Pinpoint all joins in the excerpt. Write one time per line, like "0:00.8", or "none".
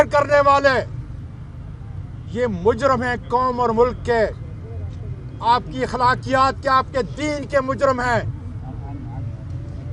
none